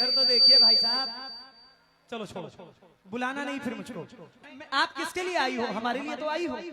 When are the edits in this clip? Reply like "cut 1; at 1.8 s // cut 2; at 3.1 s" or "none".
cut 1; at 4.4 s